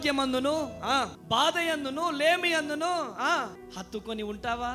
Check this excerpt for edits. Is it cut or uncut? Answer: cut